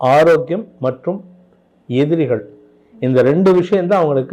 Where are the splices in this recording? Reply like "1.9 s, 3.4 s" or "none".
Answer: none